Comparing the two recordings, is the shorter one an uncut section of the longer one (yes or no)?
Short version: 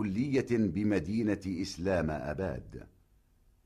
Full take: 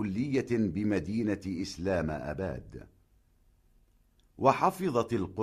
yes